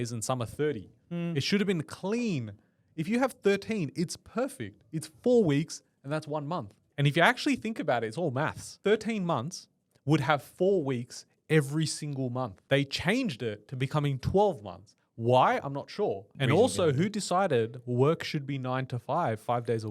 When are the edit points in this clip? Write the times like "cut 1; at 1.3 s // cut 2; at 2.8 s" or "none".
cut 1; at 6.8 s // cut 2; at 8.7 s // cut 3; at 12.6 s // cut 4; at 16.3 s